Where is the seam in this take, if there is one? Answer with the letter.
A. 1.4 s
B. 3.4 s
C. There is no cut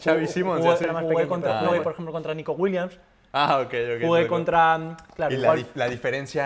A